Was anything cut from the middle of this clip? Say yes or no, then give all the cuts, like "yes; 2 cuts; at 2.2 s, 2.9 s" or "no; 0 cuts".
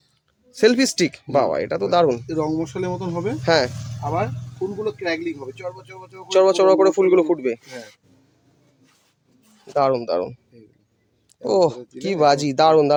no; 0 cuts